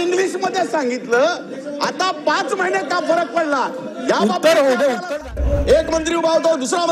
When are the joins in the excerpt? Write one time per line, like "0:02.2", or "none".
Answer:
0:05.2

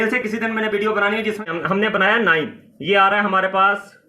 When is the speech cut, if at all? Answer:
0:01.5

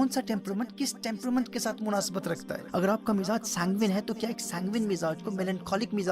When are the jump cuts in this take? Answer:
0:02.5

